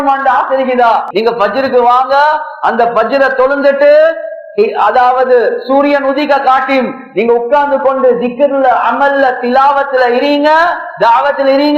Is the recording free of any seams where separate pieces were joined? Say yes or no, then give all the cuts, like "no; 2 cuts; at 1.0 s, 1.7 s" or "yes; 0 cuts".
no; 1 cut; at 1.1 s